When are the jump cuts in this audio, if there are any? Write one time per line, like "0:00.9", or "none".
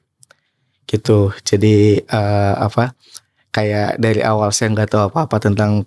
none

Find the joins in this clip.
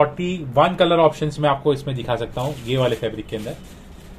none

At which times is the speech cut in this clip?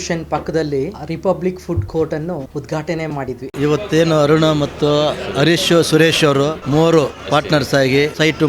0:01.0
0:02.5
0:03.5

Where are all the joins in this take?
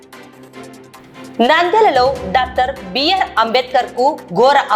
0:01.0

